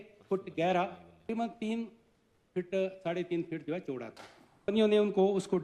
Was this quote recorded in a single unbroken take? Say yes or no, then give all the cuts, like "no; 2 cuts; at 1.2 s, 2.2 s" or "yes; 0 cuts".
no; 2 cuts; at 1.3 s, 4.7 s